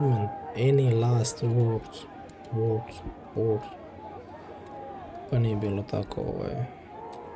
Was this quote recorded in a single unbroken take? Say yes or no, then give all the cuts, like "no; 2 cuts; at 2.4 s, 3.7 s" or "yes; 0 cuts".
yes; 0 cuts